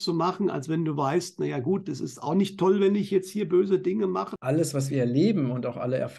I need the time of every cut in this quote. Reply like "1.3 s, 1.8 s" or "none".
4.3 s